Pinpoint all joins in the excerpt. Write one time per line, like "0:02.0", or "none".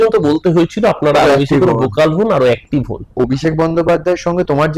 0:03.1